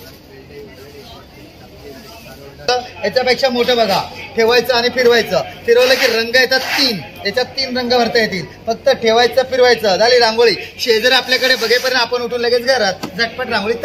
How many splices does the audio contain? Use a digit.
1